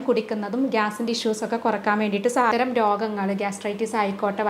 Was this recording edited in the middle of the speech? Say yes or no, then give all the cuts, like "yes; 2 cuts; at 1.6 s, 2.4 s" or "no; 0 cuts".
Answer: yes; 1 cut; at 2.5 s